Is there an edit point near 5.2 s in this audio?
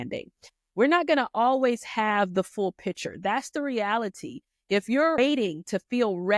yes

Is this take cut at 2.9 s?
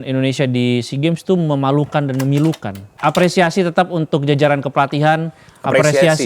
yes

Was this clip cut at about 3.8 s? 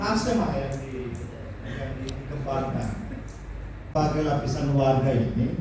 yes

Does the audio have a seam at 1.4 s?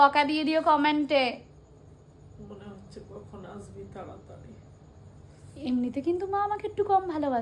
no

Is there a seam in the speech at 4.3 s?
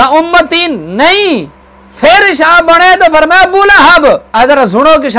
yes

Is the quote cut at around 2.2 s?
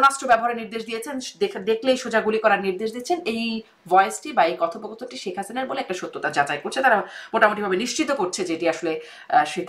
no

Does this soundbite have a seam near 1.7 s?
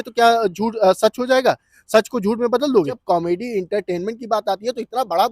no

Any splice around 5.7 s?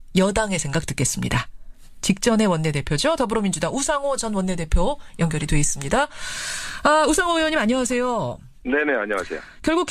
no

